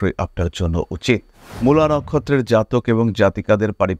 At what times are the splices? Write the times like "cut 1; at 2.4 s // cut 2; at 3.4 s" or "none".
cut 1; at 1.4 s